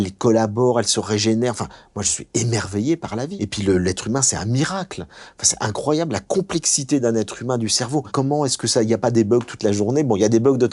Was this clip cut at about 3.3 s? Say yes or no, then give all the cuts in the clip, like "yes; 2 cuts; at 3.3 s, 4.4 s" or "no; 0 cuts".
yes; 2 cuts; at 3.3 s, 8.1 s